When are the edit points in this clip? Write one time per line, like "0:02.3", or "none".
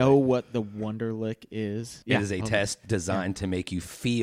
0:01.9